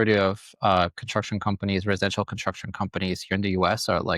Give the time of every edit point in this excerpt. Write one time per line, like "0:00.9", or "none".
none